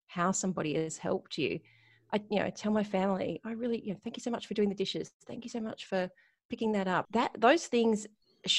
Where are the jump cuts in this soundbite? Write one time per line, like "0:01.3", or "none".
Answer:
0:07.1